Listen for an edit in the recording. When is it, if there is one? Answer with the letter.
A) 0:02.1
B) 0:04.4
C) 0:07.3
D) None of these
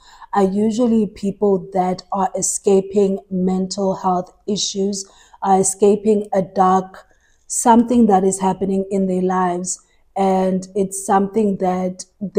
D